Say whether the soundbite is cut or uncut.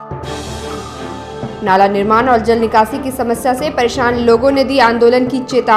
uncut